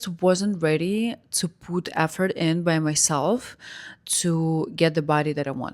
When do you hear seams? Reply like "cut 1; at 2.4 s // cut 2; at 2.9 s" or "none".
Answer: none